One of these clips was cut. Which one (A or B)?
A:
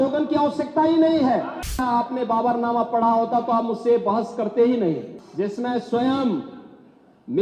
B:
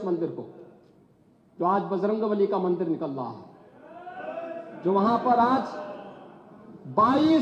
A